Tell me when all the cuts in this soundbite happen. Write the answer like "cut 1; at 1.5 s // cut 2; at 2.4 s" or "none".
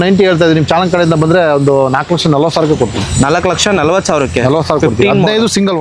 none